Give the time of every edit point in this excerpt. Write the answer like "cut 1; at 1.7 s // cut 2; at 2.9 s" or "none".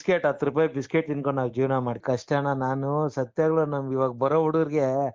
cut 1; at 2.0 s